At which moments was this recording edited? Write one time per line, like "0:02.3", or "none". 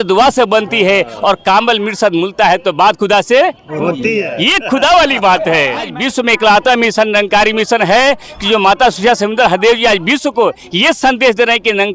0:05.9